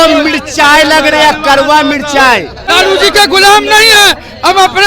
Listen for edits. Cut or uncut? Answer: cut